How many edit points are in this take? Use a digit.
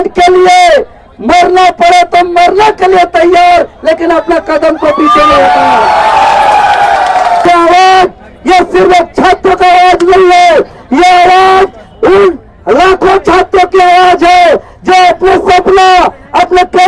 1